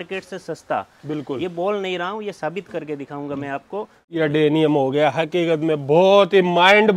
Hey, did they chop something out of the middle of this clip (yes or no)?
yes